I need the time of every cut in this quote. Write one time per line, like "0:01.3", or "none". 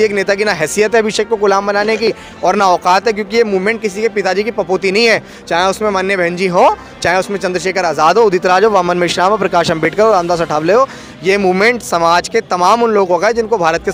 none